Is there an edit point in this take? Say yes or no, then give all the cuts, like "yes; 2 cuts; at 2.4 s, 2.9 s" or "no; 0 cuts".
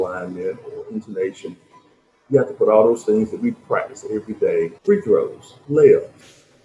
yes; 2 cuts; at 4.8 s, 5.5 s